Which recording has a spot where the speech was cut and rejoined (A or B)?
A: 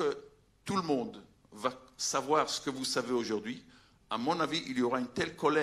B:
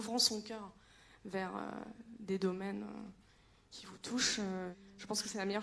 B